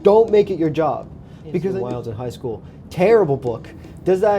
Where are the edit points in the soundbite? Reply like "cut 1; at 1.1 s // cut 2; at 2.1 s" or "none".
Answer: cut 1; at 1.8 s